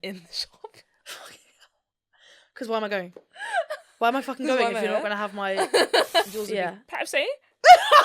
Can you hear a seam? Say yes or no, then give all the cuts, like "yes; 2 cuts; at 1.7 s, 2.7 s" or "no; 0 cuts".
yes; 1 cut; at 6.3 s